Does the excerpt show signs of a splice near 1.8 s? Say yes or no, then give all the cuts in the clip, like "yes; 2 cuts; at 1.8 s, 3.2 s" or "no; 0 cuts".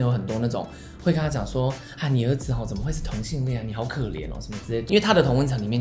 no; 1 cut; at 4.8 s